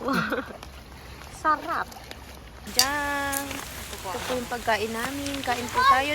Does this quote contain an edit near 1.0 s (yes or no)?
no